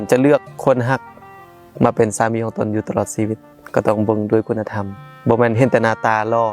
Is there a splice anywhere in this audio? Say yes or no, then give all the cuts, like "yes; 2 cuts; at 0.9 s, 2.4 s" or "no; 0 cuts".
yes; 1 cut; at 3.5 s